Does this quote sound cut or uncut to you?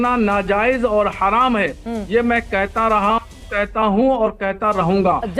uncut